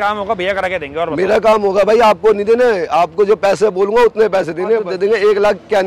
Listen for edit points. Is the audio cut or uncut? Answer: cut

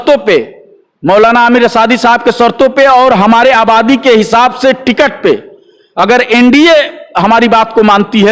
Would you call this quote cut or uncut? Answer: uncut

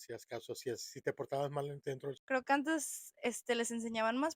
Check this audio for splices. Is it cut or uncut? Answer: cut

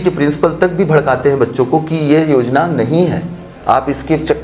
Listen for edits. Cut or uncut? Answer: uncut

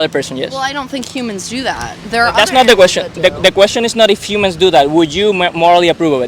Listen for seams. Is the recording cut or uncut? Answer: uncut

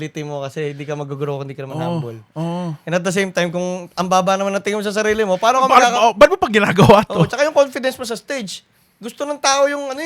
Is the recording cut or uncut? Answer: uncut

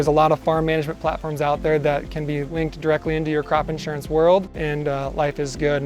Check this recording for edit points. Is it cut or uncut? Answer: cut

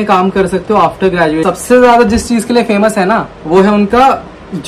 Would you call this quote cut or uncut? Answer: cut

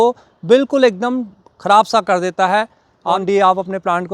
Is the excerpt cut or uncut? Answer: cut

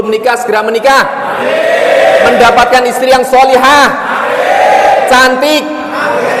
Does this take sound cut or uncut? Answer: uncut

